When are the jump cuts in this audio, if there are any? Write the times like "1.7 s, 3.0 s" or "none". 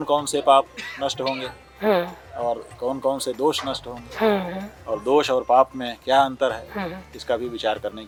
none

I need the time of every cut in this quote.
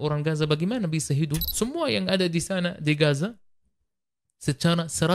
1.5 s

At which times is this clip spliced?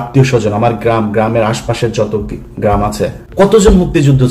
3.2 s

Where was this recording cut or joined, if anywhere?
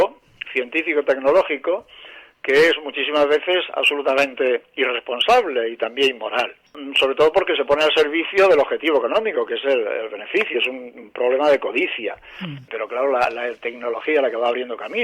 6.8 s, 12.6 s

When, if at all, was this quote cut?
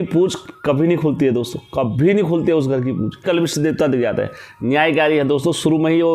3.2 s

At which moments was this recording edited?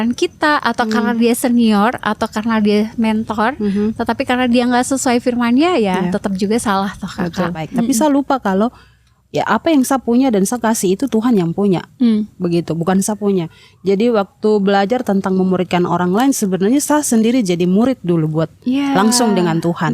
7.7 s

